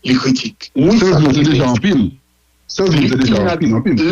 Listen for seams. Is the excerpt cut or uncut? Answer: cut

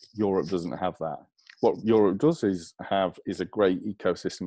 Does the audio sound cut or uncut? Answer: cut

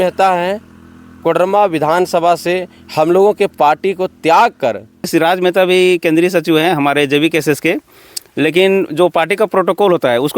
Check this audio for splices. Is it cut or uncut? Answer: cut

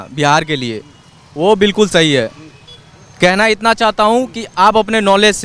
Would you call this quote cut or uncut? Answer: uncut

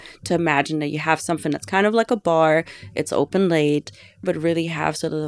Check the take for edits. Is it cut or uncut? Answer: cut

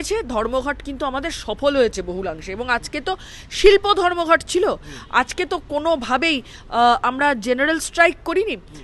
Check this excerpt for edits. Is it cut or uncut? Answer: uncut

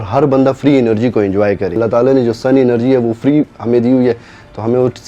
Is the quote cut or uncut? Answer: cut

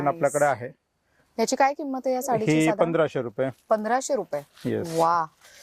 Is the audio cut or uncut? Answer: uncut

